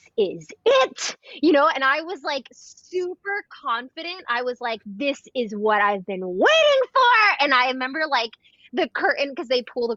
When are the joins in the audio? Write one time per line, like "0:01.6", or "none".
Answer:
none

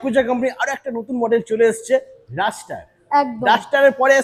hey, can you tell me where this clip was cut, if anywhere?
none

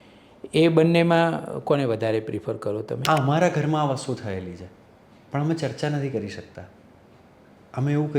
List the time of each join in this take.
0:02.9

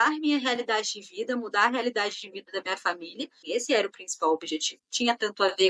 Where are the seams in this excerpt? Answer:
0:03.4
0:04.8

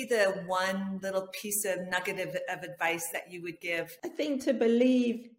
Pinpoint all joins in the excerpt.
0:03.9

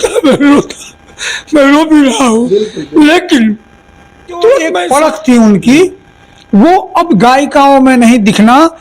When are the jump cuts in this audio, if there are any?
0:04.8

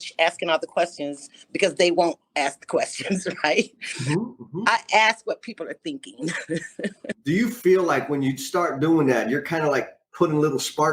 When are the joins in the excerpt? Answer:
0:07.1

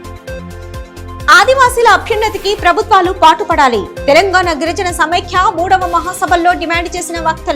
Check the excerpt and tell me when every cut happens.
0:01.0

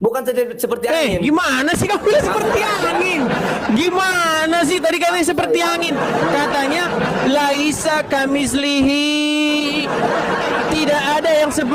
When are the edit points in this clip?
none

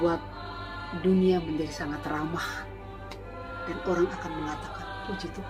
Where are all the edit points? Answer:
none

